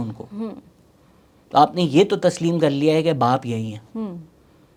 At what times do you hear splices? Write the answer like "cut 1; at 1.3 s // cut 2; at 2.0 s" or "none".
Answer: none